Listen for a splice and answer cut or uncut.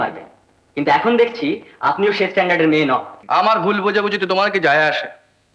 cut